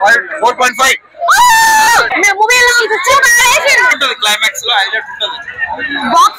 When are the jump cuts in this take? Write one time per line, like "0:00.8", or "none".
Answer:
0:02.1
0:04.0